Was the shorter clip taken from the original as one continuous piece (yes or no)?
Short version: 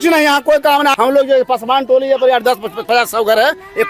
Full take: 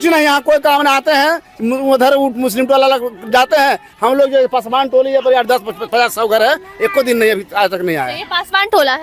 no